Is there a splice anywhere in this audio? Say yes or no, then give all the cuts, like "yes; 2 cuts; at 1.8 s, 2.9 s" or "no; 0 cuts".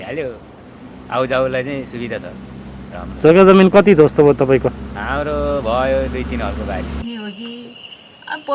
yes; 1 cut; at 7.0 s